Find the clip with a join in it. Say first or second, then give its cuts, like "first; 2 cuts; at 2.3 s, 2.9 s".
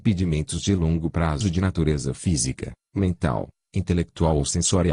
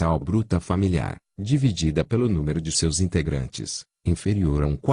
second; 1 cut; at 0.9 s